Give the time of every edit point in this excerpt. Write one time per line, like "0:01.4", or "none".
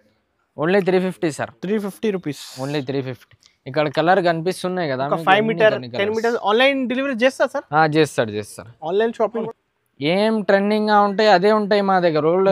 0:09.4